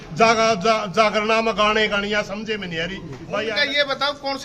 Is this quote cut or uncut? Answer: cut